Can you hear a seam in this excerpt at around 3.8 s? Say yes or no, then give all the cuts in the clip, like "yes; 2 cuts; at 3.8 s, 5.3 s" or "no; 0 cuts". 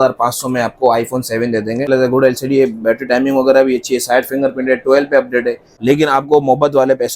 no; 2 cuts; at 1.9 s, 5.7 s